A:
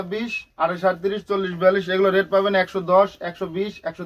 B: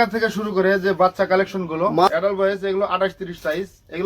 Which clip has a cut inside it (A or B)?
B